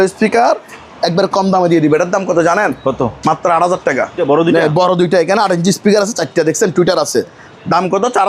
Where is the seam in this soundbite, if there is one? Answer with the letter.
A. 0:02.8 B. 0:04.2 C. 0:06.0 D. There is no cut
B